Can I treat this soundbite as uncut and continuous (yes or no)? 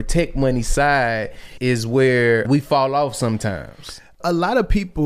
no